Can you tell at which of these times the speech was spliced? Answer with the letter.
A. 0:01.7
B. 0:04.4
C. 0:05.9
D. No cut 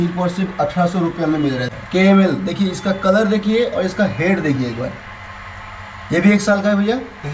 A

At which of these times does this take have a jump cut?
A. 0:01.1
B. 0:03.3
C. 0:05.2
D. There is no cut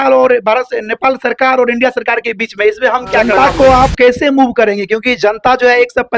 B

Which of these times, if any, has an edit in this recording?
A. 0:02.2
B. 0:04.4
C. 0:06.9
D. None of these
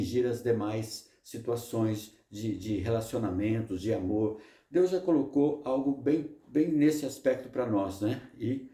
D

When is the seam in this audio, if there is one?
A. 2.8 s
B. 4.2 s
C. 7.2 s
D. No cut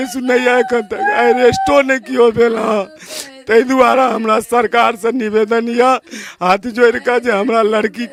D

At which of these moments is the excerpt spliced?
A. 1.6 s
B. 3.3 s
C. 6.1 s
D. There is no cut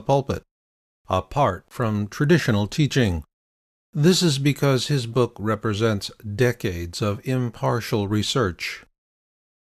A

